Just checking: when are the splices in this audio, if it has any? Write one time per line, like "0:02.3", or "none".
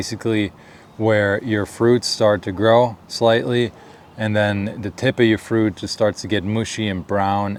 none